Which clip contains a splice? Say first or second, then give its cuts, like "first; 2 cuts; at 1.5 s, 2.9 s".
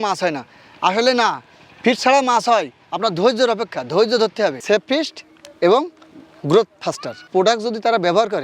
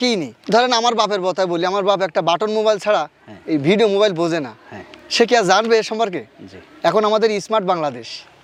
first; 2 cuts; at 4.6 s, 7.2 s